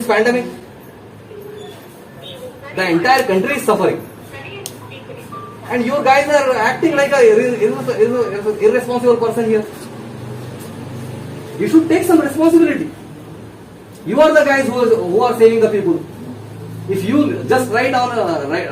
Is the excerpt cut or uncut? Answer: uncut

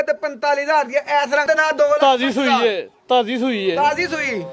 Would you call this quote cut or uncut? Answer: cut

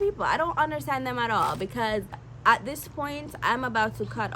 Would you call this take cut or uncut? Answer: cut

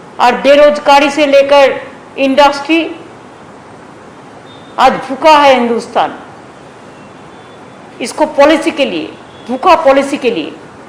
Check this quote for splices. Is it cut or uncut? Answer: uncut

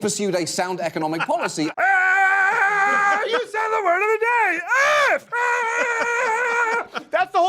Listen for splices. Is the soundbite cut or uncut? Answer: cut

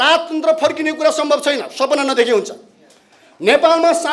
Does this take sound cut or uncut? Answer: uncut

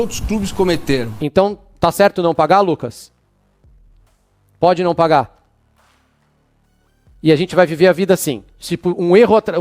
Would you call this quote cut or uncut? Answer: cut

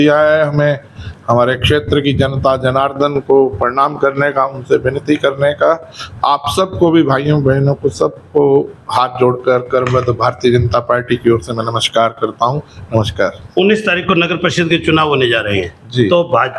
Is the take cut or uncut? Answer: uncut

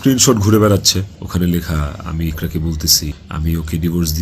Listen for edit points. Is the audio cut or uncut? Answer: cut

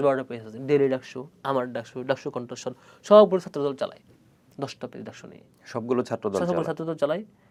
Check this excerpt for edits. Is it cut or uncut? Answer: uncut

